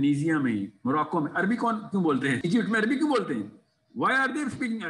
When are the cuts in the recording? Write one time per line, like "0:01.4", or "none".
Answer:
0:02.4